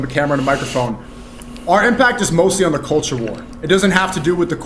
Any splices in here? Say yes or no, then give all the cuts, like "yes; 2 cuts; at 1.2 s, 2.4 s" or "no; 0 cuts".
no; 0 cuts